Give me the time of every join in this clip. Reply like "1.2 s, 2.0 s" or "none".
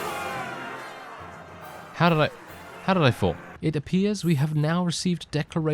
3.5 s